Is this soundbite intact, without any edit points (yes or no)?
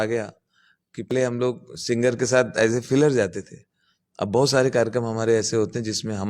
no